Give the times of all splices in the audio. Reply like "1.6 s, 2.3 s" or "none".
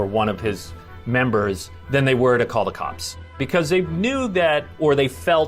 3.4 s